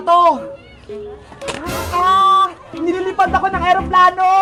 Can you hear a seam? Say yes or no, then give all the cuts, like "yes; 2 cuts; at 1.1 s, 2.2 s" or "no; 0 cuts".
no; 0 cuts